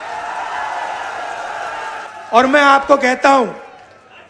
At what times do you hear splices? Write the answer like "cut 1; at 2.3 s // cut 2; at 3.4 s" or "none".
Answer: cut 1; at 2.0 s

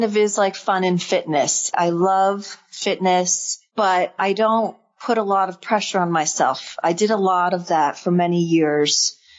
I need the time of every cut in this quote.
cut 1; at 1.7 s

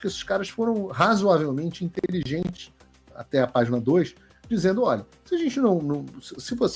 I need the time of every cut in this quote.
none

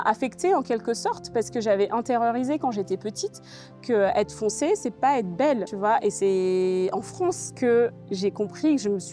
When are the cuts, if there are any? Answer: none

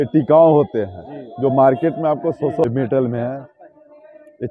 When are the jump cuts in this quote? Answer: cut 1; at 2.6 s

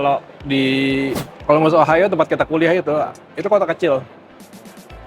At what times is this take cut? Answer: cut 1; at 1.3 s

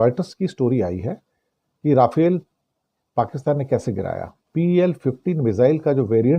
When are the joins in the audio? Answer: cut 1; at 4.5 s

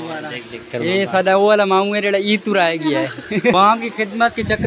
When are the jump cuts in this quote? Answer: cut 1; at 3.4 s

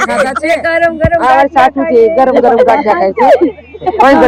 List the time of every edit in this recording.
none

